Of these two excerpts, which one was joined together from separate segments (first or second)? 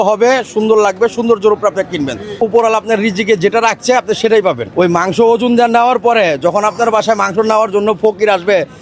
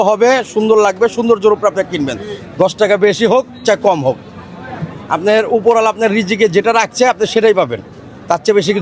first